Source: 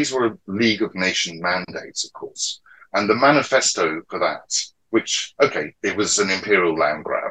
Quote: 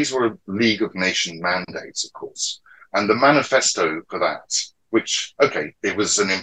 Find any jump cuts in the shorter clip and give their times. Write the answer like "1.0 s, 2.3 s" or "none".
none